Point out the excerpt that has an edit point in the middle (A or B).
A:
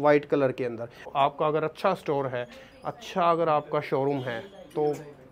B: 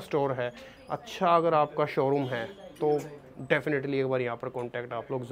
A